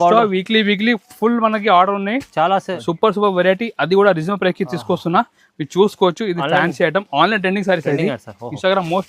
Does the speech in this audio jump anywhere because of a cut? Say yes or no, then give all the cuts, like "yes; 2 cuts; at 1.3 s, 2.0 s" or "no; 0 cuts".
yes; 1 cut; at 2.8 s